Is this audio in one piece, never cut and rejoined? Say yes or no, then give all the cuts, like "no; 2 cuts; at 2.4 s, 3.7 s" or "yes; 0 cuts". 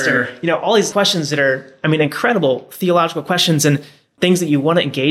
no; 2 cuts; at 0.9 s, 4.1 s